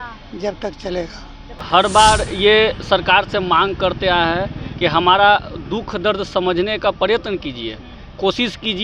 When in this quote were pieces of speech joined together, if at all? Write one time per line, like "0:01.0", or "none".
0:01.6